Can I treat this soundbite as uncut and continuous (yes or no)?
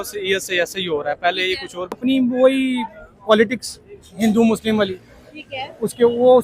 no